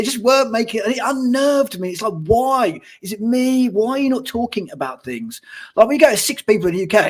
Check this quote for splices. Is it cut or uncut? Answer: uncut